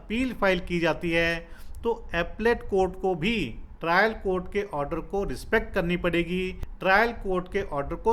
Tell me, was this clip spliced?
yes; 1 cut; at 6.6 s

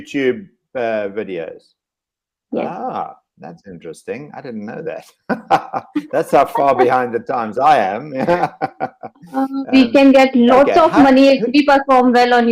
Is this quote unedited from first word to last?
yes; 0 cuts

